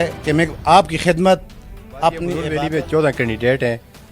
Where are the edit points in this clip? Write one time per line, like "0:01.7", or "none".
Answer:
0:02.5